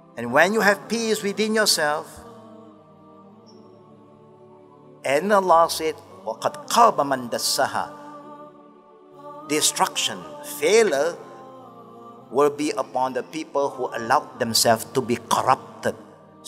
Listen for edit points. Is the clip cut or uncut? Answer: cut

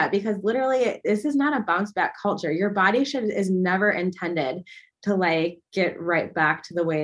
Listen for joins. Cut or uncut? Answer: uncut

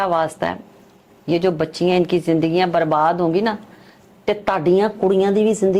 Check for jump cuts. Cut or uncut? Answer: uncut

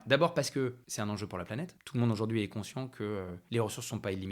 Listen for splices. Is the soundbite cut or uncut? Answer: cut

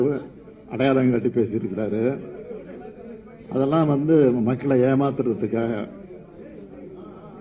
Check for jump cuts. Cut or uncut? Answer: uncut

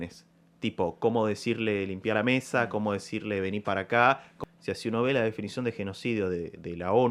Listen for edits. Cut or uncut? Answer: cut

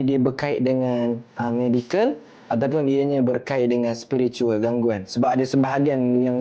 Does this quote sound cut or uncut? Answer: uncut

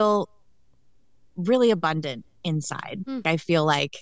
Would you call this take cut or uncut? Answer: cut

